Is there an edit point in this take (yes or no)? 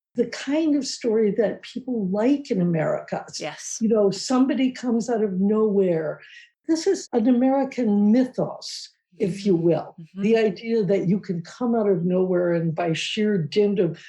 yes